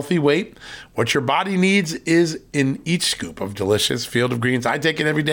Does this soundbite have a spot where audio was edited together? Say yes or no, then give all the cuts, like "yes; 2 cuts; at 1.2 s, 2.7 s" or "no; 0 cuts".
no; 0 cuts